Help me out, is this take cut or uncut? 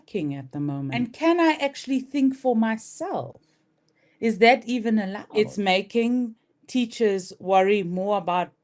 cut